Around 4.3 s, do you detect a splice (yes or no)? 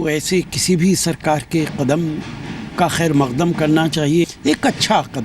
yes